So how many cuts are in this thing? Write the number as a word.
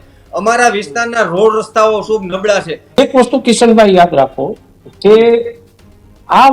one